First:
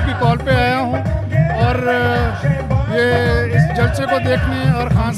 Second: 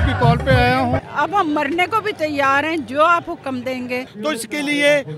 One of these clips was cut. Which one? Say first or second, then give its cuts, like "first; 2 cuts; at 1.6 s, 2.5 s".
second; 2 cuts; at 1.1 s, 4.1 s